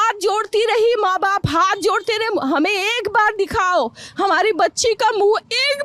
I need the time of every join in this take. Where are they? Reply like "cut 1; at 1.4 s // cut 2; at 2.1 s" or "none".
none